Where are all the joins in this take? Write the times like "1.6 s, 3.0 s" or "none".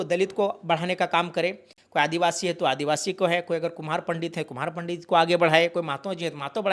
none

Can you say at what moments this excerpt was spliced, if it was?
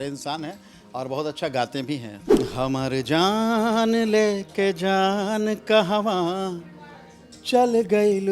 2.2 s

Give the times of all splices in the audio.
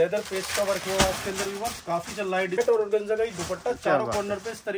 2.6 s

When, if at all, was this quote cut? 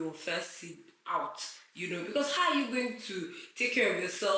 none

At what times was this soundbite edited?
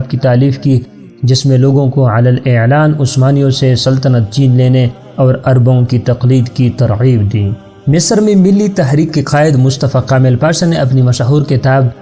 none

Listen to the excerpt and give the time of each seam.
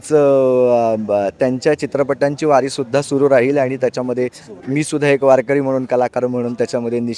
none

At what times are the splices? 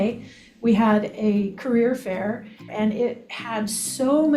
2.9 s

